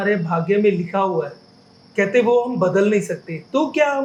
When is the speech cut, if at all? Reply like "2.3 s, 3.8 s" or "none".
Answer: none